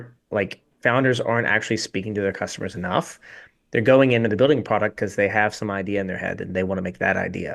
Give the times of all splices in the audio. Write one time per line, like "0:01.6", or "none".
none

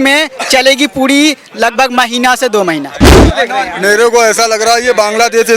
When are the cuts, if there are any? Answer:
0:03.2

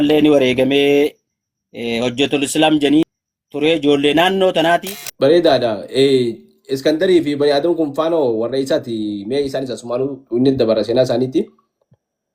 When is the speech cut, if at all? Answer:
0:03.2
0:05.0

